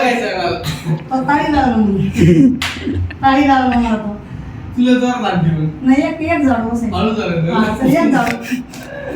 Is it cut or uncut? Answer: uncut